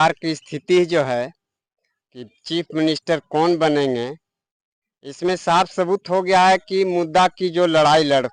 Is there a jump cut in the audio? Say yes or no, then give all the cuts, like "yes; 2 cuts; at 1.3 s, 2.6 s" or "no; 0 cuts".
no; 0 cuts